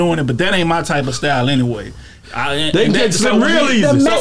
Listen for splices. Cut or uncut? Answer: uncut